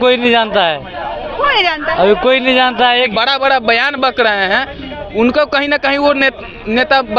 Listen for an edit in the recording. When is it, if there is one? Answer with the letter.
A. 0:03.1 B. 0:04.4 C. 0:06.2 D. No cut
A